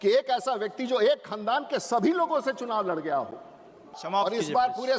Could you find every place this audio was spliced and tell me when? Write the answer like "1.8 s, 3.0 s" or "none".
4.0 s